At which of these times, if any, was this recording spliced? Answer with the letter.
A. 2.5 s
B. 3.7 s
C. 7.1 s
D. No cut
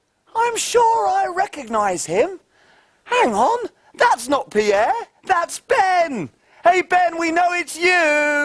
B